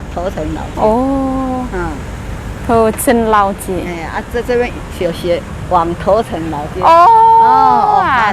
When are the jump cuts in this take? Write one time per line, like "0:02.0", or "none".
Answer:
none